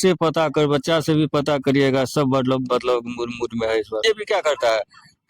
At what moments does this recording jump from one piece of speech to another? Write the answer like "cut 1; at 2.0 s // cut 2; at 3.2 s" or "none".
cut 1; at 4.0 s